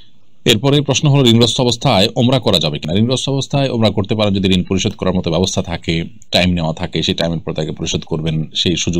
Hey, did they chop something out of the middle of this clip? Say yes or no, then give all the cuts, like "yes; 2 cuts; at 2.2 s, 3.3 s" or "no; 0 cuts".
no; 0 cuts